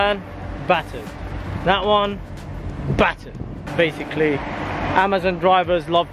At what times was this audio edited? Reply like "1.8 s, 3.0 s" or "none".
none